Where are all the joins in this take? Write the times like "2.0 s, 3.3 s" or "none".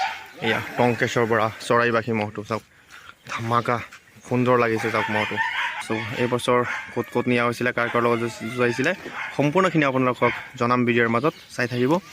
5.7 s